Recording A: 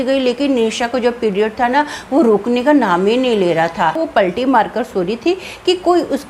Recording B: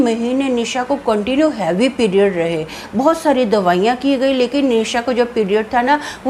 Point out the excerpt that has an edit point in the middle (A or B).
A